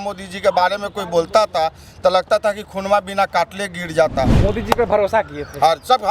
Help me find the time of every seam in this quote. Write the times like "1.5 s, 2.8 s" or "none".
4.4 s